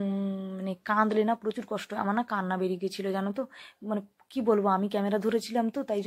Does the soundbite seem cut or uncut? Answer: uncut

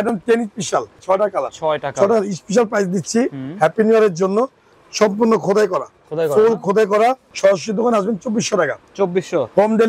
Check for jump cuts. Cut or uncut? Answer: cut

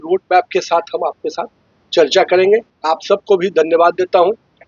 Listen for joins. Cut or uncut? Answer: cut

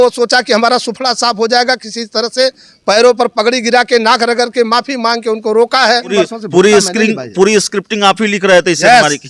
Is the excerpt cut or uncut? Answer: cut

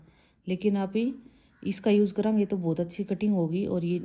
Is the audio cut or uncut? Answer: uncut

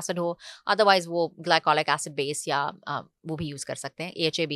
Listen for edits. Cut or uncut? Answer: uncut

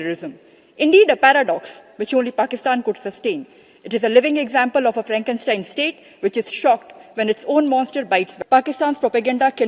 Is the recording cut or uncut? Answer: cut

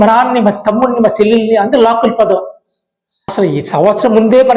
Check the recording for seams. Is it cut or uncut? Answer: cut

